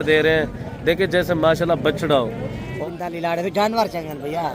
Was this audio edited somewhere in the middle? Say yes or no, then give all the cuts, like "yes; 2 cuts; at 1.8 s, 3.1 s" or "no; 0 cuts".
yes; 1 cut; at 2.7 s